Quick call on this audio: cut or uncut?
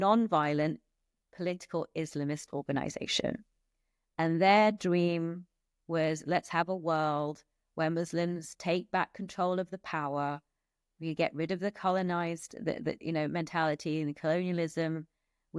uncut